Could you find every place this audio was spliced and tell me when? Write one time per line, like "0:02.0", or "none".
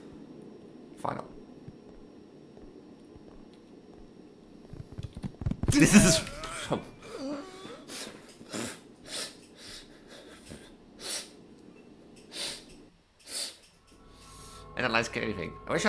0:14.2